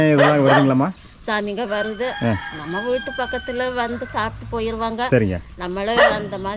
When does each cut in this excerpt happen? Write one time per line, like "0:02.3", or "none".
0:01.0